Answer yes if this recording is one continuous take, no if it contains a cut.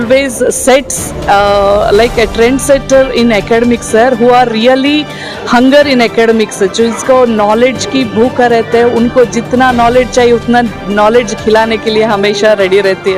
yes